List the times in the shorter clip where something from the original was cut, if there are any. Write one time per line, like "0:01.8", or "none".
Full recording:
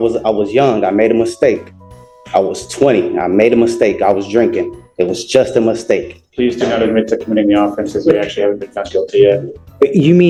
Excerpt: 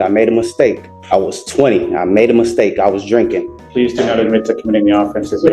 0:00.9
0:03.6